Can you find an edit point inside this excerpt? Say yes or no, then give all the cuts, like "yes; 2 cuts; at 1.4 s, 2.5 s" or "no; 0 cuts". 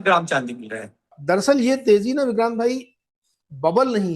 yes; 1 cut; at 1.1 s